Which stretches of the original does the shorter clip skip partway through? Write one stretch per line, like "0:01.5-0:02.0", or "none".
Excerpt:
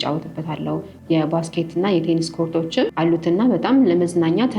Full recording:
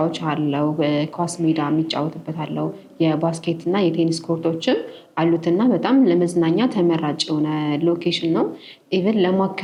0:04.8-0:05.1